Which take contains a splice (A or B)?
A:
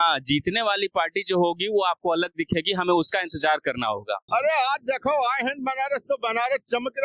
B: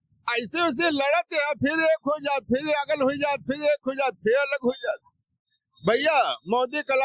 A